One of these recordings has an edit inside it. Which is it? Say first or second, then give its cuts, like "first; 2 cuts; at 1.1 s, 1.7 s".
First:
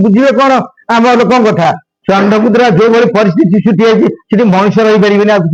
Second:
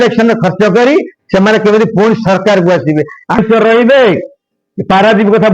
second; 1 cut; at 3.4 s